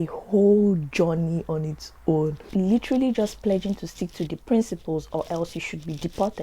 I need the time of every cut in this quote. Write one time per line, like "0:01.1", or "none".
0:02.4